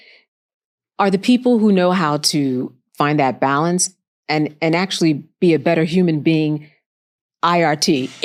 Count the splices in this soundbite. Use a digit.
0